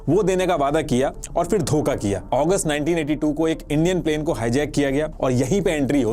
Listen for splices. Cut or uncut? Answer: cut